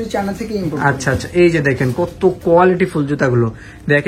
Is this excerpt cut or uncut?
uncut